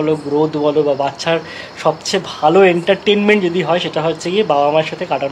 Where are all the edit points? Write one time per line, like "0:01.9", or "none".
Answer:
none